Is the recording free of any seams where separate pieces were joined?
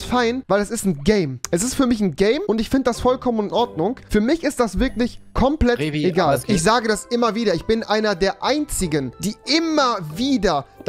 yes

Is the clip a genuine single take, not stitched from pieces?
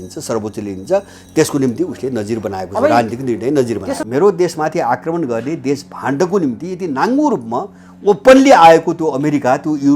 no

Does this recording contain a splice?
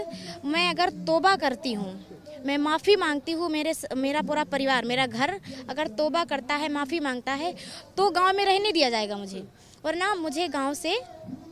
no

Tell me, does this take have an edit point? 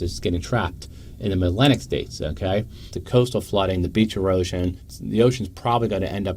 yes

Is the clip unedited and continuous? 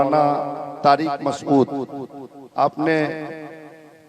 yes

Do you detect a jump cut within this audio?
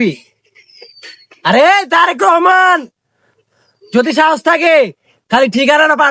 no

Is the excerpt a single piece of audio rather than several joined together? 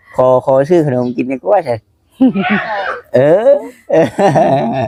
yes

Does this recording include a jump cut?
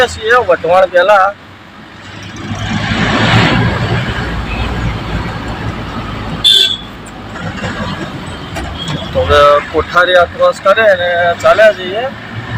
no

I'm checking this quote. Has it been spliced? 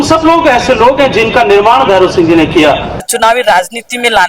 yes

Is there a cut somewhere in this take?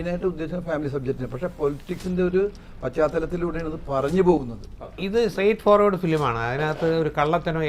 yes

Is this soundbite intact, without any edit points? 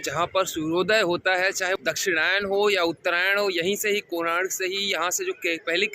no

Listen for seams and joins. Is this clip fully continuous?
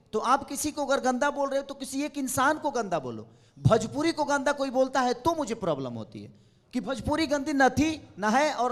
yes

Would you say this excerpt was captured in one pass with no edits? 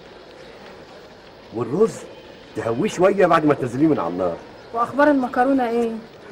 yes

